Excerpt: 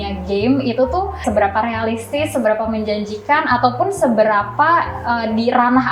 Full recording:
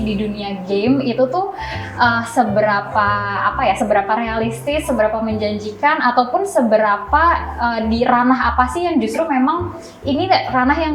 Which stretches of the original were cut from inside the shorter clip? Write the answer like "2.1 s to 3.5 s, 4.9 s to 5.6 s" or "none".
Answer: 1.6 s to 3.8 s